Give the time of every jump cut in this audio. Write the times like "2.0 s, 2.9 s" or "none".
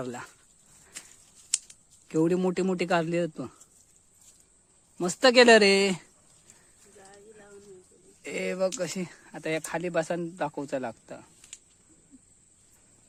none